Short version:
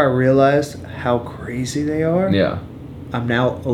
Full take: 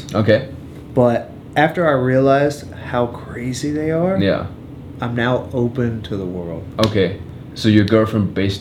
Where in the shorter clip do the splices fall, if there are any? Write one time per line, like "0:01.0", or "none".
none

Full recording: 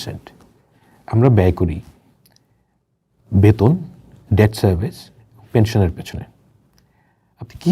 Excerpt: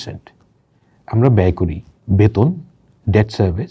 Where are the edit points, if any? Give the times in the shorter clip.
0:01.9

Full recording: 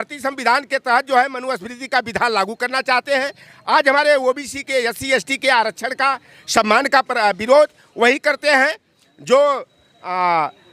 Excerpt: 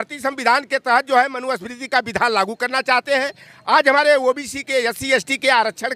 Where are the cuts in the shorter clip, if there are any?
none

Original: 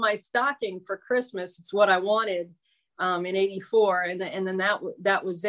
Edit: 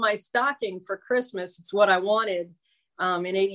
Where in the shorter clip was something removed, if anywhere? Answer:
none

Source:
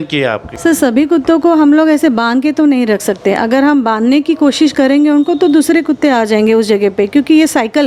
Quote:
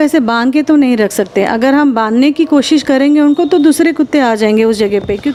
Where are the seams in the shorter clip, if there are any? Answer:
none

